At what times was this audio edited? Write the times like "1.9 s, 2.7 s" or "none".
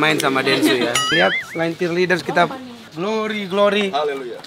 1.0 s, 2.8 s

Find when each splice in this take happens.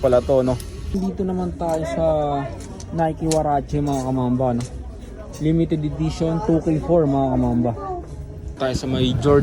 0.9 s, 8.5 s

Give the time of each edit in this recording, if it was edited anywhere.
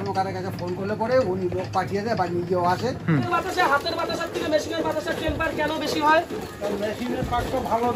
3.3 s

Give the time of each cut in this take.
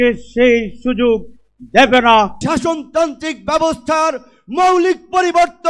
2.4 s

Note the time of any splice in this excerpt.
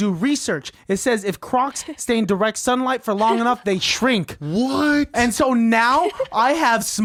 none

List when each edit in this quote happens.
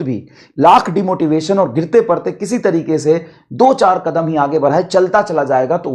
none

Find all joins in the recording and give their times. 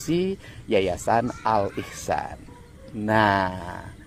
none

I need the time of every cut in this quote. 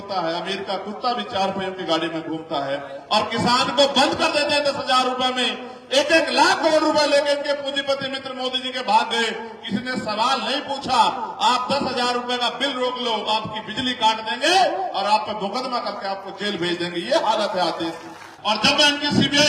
18.3 s

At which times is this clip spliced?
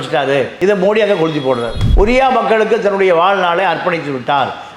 1.9 s

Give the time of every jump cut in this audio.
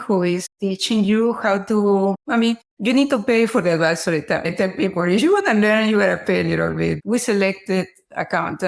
4.4 s, 7.0 s

